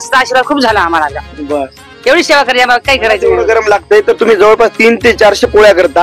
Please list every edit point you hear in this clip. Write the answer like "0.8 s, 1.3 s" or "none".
3.3 s